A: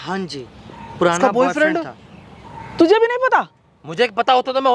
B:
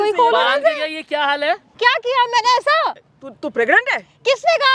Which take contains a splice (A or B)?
B